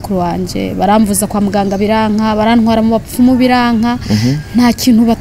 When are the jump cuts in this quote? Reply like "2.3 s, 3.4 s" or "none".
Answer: none